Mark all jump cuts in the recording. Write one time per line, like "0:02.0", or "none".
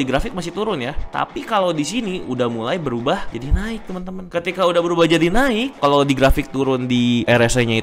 0:01.0
0:03.3